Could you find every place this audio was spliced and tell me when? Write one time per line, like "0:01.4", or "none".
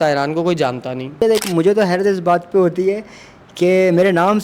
0:01.2